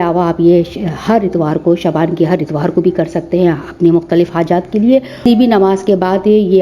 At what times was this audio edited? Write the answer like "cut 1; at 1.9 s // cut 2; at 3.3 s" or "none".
cut 1; at 5.2 s